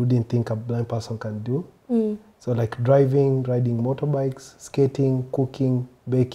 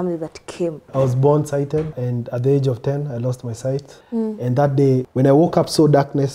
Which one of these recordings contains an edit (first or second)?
second